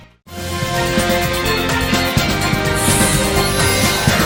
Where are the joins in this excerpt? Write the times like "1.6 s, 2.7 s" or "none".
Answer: none